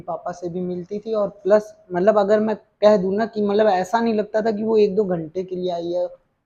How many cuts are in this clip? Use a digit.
0